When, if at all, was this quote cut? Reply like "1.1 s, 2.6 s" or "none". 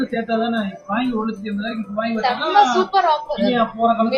none